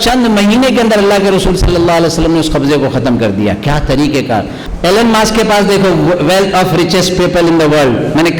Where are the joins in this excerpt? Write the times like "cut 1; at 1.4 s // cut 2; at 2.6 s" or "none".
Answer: cut 1; at 4.6 s